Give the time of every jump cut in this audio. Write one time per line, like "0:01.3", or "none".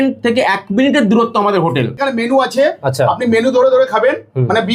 0:02.0